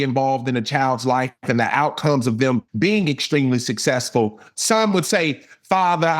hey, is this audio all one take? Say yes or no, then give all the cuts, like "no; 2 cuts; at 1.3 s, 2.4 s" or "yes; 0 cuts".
no; 2 cuts; at 2.7 s, 4.5 s